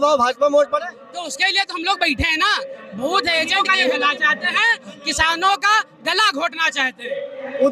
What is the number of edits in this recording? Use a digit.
1